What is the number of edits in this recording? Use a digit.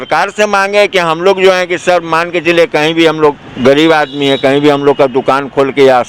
0